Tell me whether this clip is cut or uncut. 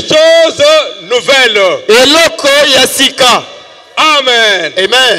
uncut